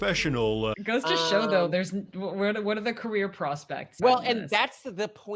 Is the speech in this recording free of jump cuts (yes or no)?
no